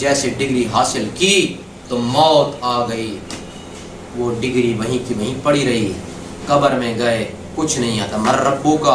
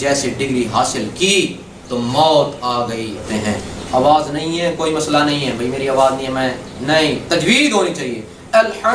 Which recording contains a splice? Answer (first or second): second